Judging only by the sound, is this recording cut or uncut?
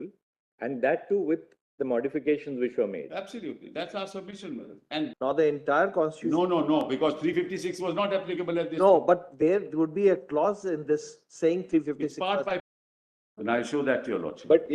cut